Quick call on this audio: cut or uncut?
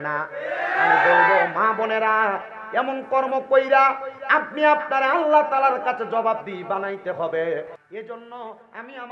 cut